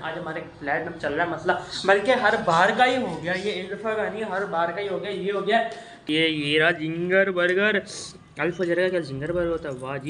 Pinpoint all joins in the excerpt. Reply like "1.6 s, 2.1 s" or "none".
6.0 s